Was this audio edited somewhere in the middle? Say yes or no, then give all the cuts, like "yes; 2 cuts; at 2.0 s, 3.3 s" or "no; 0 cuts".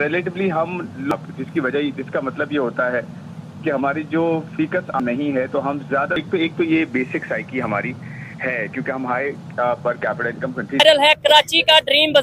yes; 4 cuts; at 1.1 s, 5.0 s, 6.2 s, 10.8 s